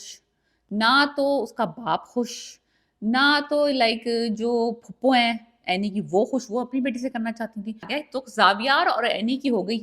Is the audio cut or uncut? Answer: cut